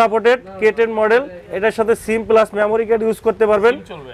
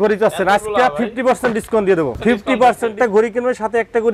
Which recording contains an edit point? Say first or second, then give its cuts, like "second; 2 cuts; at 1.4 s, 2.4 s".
second; 2 cuts; at 2.2 s, 2.9 s